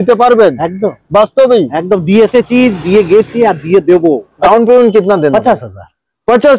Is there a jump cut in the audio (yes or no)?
yes